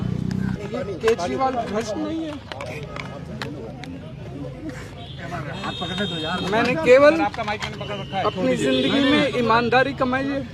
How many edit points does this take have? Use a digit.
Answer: 0